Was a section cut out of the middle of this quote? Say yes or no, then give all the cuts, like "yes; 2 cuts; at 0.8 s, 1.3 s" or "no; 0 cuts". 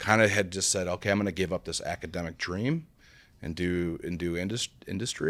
no; 0 cuts